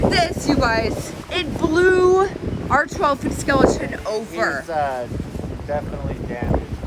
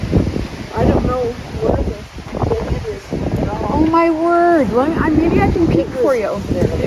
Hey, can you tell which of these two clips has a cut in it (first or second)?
first